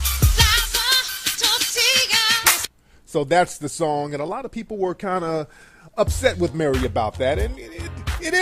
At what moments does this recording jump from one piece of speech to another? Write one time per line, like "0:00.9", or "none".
0:06.2